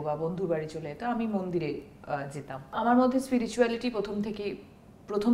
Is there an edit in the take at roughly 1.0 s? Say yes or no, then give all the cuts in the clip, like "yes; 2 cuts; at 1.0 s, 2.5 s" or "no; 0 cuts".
no; 1 cut; at 2.7 s